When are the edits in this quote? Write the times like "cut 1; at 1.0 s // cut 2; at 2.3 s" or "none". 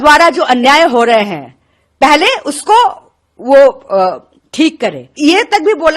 cut 1; at 5.1 s